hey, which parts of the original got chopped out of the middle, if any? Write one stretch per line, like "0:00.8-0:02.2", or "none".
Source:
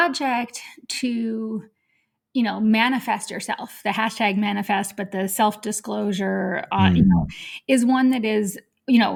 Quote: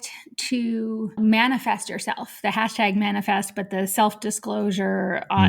0:01.6-0:02.5